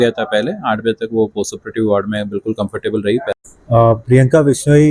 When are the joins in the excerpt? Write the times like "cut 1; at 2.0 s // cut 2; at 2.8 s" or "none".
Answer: cut 1; at 3.3 s